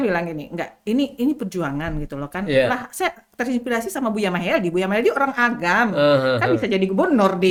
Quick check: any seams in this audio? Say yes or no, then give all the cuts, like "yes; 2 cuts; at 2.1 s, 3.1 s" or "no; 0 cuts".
no; 0 cuts